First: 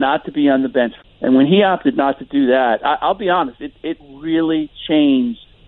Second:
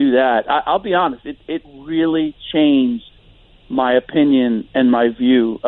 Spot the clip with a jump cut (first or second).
first